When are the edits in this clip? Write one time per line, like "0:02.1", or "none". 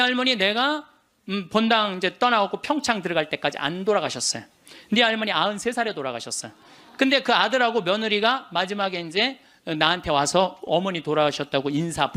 none